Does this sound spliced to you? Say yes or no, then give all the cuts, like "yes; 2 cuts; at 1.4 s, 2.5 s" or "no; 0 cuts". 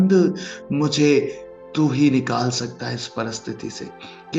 no; 0 cuts